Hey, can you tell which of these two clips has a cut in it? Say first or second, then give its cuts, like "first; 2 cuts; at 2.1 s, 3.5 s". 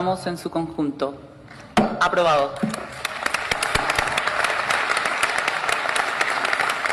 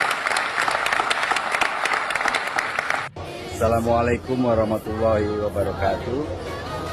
second; 1 cut; at 3.2 s